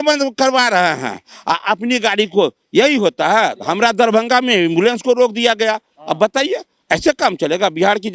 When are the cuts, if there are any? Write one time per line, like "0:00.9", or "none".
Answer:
none